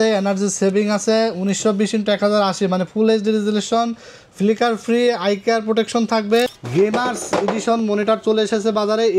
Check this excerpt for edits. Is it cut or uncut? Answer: cut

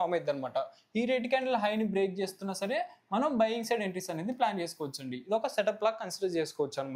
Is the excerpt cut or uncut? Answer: uncut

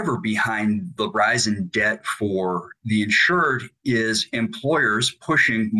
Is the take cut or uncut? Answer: cut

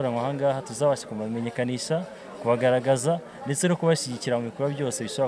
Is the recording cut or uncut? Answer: uncut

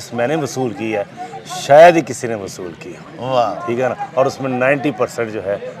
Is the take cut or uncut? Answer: uncut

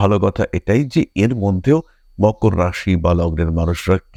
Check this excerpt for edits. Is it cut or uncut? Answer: uncut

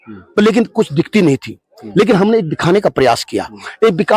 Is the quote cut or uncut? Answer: uncut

